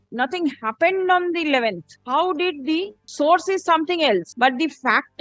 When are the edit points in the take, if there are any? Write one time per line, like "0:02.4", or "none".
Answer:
0:01.9
0:03.0
0:04.3